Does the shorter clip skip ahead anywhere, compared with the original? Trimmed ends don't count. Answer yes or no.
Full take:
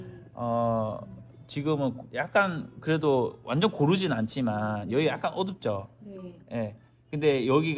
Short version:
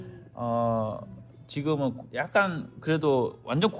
no